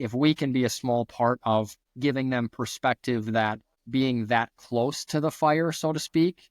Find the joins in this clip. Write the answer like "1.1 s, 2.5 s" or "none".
1.8 s, 3.7 s